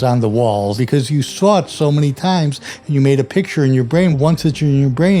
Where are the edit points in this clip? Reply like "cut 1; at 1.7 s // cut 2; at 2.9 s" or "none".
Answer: cut 1; at 0.8 s // cut 2; at 4.1 s